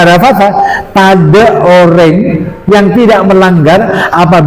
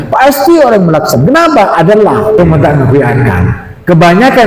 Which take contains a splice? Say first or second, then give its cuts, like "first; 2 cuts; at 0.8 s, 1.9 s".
second; 1 cut; at 2.4 s